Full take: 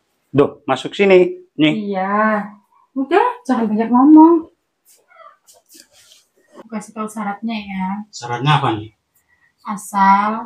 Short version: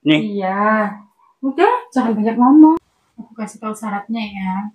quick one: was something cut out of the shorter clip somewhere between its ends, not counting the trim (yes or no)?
yes